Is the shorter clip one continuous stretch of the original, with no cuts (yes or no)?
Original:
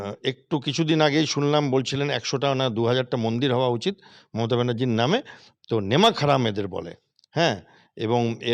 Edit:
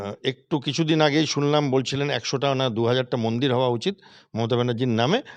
yes